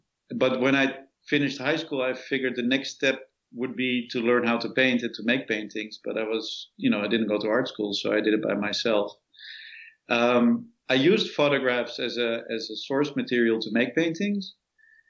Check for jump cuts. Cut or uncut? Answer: uncut